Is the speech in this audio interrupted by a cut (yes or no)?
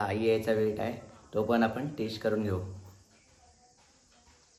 no